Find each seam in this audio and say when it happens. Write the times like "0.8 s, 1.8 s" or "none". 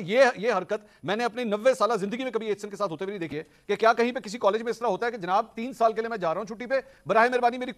3.3 s